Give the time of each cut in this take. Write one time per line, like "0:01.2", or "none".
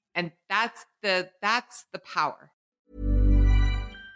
0:02.6

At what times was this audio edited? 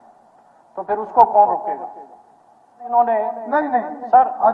0:02.9

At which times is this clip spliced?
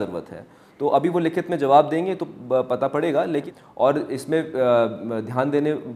0:03.5

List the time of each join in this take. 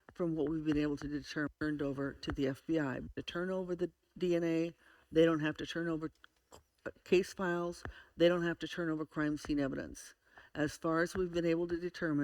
0:01.5
0:03.0

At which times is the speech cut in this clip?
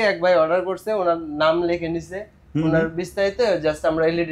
none

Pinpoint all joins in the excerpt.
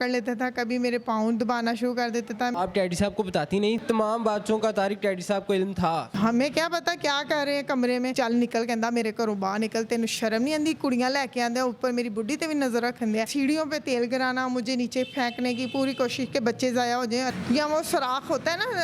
0:02.5
0:03.8
0:06.1
0:08.1
0:13.3
0:17.3

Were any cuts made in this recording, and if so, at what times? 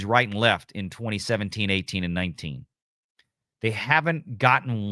none

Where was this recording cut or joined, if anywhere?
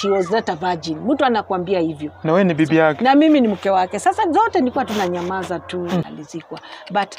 0:06.1

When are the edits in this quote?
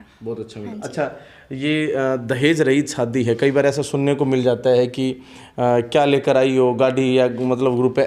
none

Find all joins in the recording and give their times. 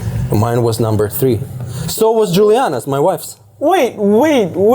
none

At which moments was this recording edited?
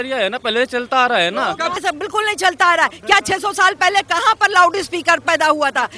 0:01.7

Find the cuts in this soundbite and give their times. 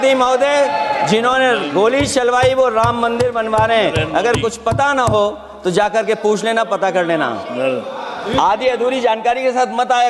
none

